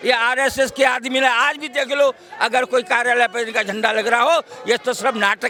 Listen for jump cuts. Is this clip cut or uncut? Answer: uncut